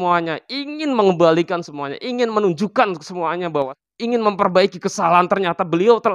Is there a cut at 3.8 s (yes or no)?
yes